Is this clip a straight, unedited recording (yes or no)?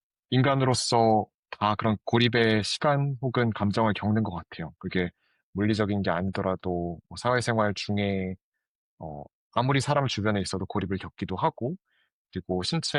yes